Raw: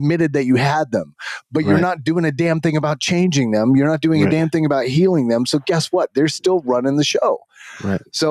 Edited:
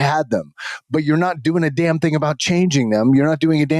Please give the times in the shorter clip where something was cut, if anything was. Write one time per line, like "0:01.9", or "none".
none